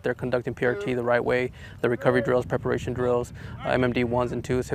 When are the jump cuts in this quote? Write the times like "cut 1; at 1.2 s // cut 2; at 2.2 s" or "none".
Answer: none